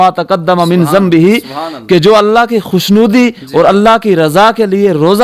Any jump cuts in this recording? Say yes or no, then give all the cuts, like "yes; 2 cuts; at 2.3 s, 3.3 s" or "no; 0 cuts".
no; 0 cuts